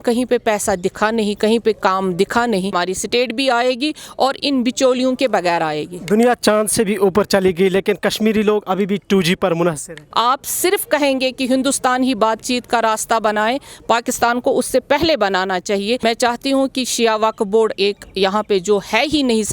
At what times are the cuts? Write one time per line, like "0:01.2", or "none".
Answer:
0:02.7
0:10.0
0:16.0